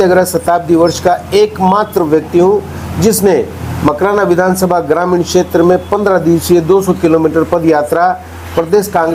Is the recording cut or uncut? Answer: uncut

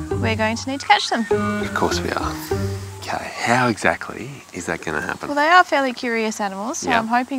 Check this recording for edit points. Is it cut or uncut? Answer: uncut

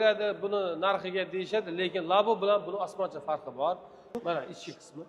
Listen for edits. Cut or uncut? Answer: cut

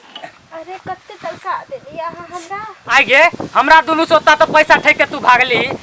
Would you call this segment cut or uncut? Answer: cut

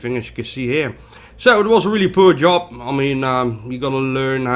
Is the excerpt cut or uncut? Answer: cut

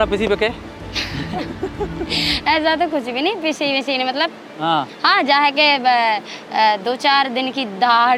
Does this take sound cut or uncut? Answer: uncut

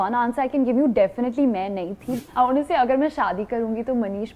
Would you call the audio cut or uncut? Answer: cut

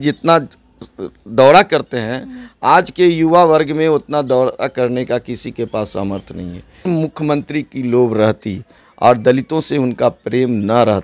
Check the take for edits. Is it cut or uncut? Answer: cut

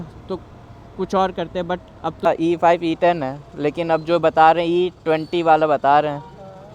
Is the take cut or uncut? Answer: cut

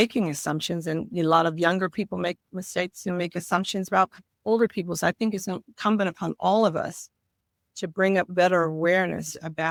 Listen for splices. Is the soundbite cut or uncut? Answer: uncut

